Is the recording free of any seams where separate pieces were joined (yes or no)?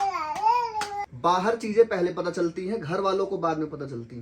no